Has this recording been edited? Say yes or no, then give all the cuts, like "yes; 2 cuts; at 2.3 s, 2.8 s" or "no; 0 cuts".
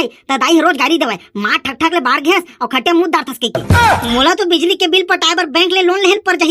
no; 0 cuts